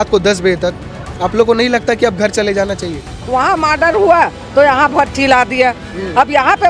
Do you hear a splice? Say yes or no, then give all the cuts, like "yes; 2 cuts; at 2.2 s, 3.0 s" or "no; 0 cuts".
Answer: yes; 1 cut; at 3.1 s